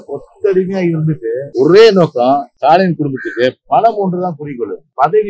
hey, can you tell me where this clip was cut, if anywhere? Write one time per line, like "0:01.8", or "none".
0:01.4
0:02.5